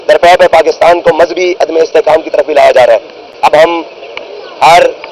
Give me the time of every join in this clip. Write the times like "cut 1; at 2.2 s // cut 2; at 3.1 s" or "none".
cut 1; at 3.2 s